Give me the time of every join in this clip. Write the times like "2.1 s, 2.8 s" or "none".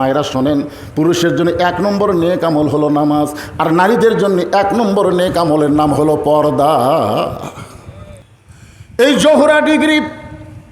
8.2 s